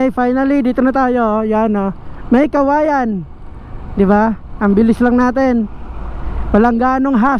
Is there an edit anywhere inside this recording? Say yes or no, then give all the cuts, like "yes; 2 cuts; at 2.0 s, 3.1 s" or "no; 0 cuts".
no; 0 cuts